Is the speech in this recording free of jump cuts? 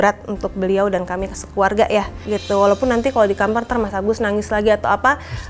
no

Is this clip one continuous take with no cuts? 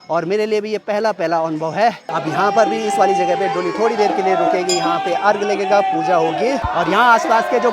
yes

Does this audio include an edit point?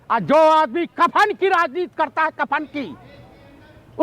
no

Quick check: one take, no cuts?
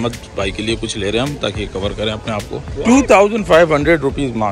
no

